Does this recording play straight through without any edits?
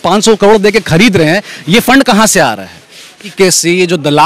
no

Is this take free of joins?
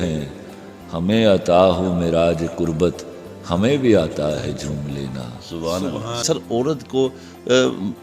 no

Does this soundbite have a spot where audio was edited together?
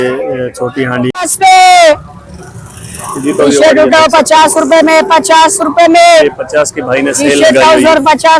yes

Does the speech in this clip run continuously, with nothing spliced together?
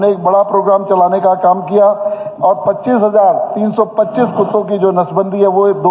yes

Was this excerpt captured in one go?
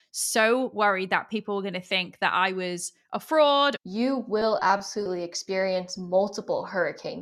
no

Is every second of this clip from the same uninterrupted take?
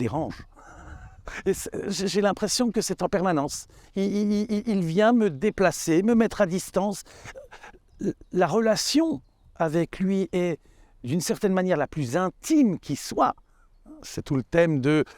yes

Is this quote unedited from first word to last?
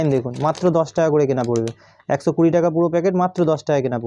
yes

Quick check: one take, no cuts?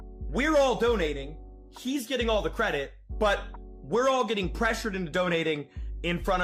yes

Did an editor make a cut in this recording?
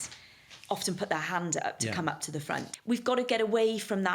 yes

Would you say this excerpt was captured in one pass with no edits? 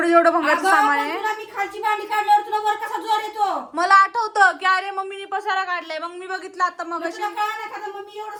yes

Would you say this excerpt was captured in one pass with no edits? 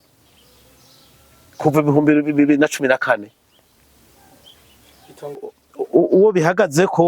no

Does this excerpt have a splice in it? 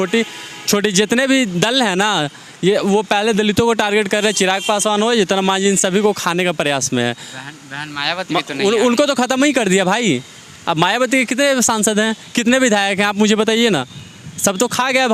no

